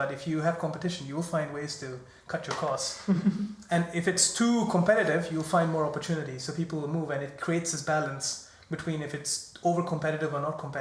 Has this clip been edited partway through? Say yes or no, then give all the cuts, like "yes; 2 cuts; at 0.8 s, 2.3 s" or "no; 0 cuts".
no; 0 cuts